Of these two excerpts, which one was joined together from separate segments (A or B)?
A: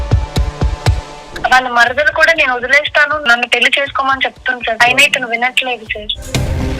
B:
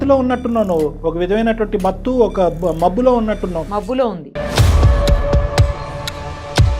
A